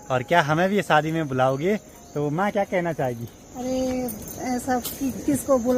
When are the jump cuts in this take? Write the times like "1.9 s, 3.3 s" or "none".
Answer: none